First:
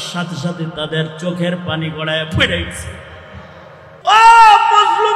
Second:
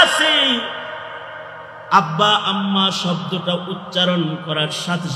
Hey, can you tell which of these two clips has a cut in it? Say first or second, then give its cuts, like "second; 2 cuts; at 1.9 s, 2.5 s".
first; 1 cut; at 3.9 s